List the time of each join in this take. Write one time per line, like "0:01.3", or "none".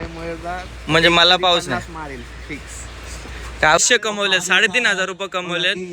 0:03.8